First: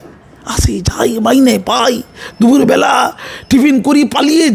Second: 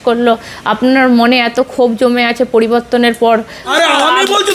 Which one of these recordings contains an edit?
second; 1 cut; at 3.6 s

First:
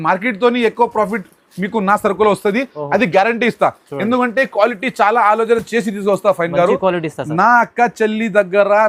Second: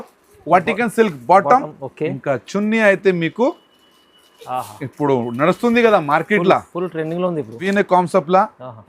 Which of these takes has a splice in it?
second; 1 cut; at 7.5 s

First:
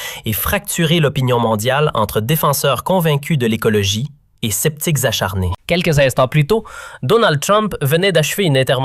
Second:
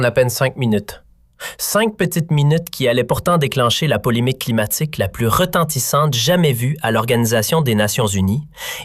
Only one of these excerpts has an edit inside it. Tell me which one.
first; 1 cut; at 2.4 s

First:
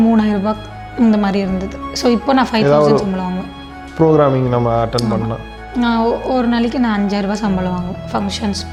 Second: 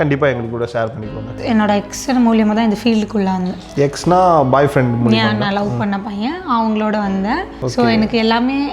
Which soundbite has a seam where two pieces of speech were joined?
second; 2 cuts; at 1.3 s, 7.6 s

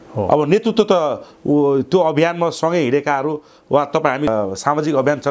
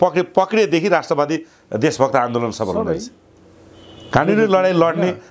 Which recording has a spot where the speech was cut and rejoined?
first; 1 cut; at 4.3 s

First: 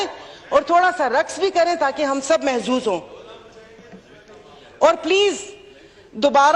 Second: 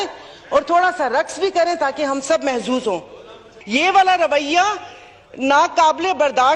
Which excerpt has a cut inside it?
second; 1 cut; at 3.5 s

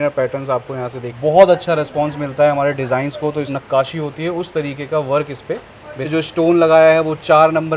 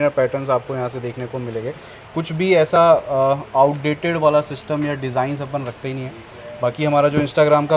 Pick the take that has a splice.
first; 3 cuts; at 1.0 s, 3.5 s, 6.1 s

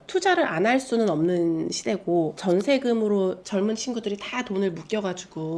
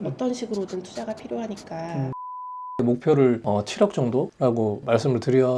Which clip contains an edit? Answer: second; 1 cut; at 2.8 s

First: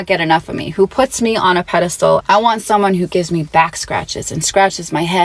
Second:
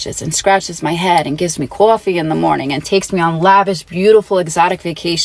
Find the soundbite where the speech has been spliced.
first; 1 cut; at 2.2 s

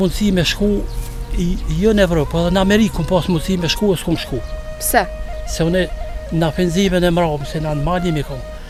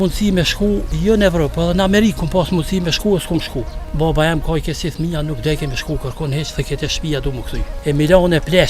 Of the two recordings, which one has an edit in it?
second; 3 cuts; at 0.9 s, 3.8 s, 7.7 s

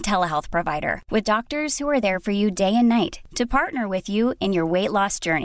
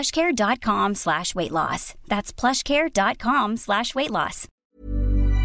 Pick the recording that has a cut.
second; 1 cut; at 4.4 s

